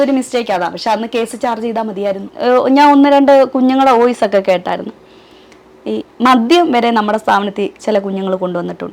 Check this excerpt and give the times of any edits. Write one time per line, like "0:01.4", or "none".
0:02.3